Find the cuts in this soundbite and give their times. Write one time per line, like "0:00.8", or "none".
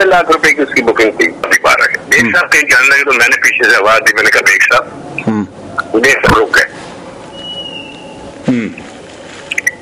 0:01.4